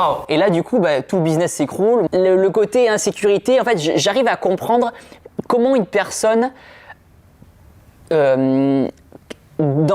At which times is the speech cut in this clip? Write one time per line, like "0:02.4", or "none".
0:02.1